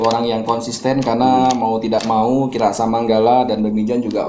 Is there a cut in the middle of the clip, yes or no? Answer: no